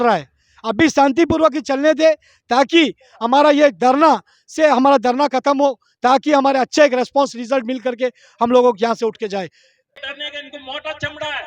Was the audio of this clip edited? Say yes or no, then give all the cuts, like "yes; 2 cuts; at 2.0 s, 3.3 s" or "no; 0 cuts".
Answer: yes; 1 cut; at 10.0 s